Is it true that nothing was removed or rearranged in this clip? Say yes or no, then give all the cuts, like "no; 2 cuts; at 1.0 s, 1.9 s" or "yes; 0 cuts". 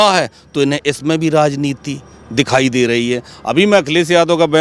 yes; 0 cuts